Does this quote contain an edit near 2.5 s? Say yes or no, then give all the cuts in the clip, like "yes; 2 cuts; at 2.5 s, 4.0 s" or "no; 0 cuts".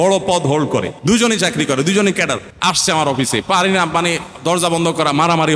yes; 2 cuts; at 0.9 s, 2.5 s